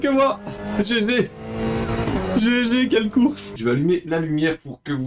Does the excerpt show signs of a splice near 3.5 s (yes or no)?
yes